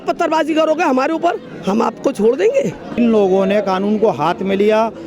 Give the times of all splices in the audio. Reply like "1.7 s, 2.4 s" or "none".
3.0 s